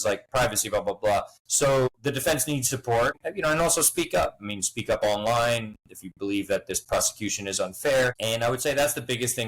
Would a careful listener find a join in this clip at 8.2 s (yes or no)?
yes